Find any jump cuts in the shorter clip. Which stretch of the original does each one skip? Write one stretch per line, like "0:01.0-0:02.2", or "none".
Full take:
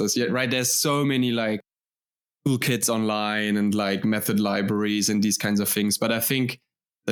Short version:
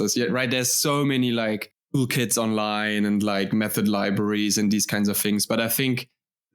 0:01.7-0:02.3